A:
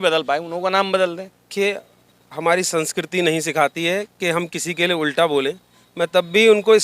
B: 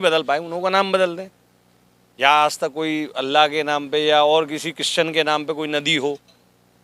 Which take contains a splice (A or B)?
A